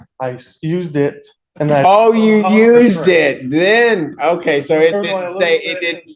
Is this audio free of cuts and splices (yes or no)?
yes